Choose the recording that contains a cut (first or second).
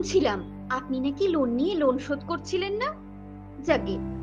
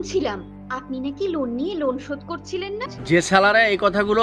second